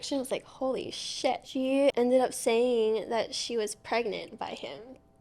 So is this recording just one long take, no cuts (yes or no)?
no